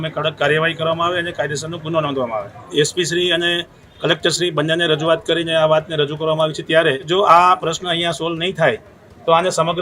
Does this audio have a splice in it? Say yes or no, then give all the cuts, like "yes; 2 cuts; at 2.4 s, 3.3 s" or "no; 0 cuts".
yes; 2 cuts; at 2.6 s, 7.1 s